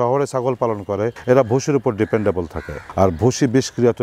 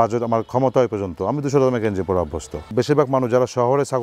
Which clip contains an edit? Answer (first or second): second